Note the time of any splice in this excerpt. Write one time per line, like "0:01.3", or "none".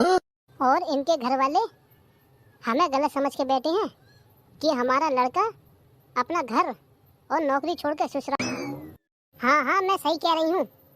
0:08.4